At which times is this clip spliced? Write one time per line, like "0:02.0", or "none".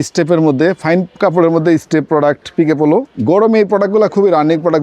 0:03.1

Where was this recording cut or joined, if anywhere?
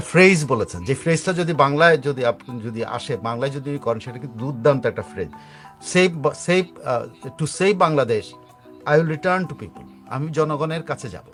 none

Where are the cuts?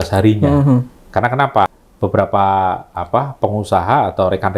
0:01.8

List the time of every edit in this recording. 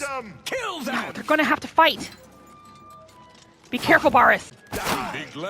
0:04.6

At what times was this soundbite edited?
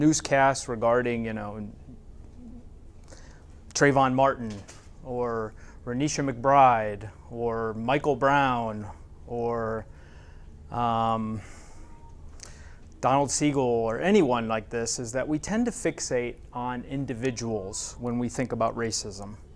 0:09.5

